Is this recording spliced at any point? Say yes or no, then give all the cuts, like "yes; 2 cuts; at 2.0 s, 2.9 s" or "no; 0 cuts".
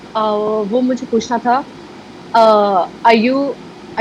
no; 0 cuts